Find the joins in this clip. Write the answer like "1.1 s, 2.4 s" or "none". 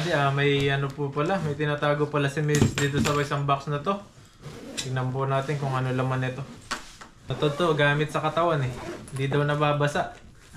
7.3 s